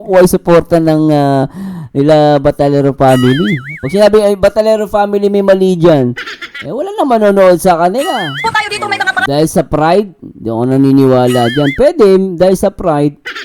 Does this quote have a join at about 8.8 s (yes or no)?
yes